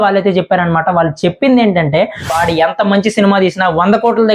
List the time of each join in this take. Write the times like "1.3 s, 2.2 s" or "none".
2.4 s